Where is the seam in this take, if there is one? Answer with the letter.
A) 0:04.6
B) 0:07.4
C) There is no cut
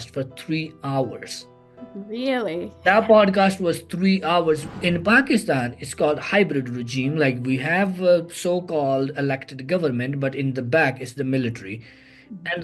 A